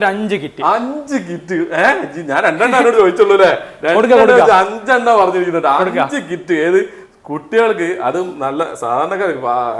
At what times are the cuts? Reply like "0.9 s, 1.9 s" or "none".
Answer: none

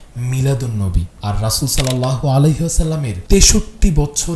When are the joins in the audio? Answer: 1.1 s, 3.1 s

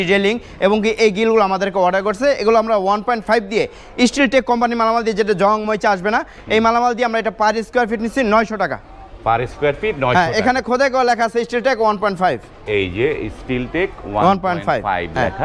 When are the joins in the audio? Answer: none

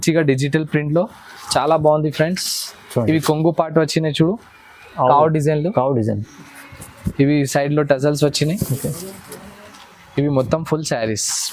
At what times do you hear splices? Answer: none

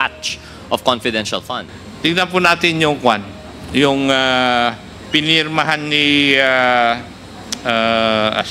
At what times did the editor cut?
1.6 s

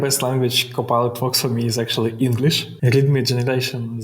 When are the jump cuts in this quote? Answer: 2.7 s

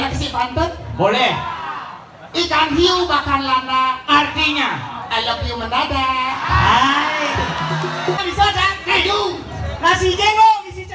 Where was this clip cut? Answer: 8.2 s

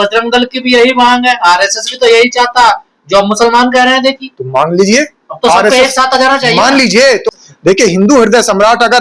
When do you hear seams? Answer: 7.3 s

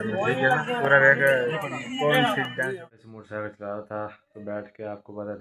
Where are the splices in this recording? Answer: 2.8 s

